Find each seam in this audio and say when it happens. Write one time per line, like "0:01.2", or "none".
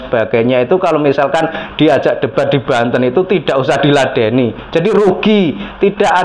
none